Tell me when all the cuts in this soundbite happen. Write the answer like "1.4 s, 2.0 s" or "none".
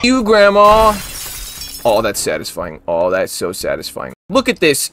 4.0 s